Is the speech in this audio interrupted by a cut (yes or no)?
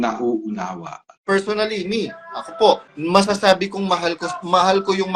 yes